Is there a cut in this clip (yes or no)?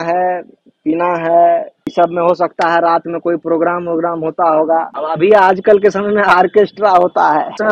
yes